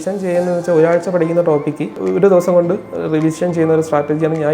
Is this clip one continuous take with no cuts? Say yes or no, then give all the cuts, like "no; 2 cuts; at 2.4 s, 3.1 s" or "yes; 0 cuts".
no; 1 cut; at 2.0 s